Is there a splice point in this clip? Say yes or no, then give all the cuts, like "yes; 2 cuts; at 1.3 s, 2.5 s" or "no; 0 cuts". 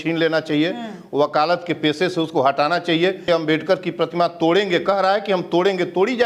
yes; 1 cut; at 3.3 s